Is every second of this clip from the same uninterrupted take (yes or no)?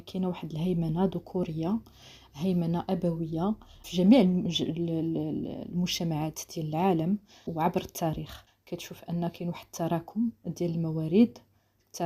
yes